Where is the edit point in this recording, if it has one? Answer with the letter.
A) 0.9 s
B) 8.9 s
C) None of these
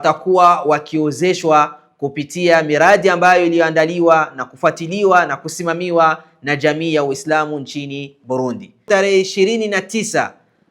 B